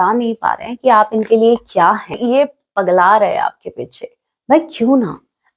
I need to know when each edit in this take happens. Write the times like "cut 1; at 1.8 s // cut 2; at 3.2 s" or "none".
cut 1; at 2.2 s